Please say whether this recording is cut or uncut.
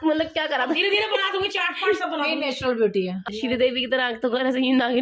cut